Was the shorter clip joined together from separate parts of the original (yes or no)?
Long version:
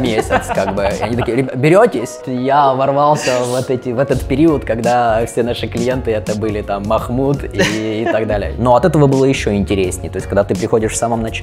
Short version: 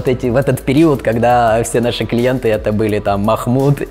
no